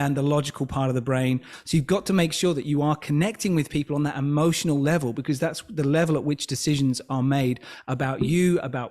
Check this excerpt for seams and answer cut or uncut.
cut